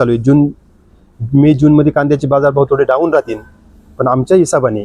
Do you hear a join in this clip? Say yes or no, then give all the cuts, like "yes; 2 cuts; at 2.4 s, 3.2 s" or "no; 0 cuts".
no; 0 cuts